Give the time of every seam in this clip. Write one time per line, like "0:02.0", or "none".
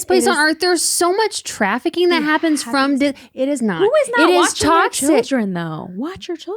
none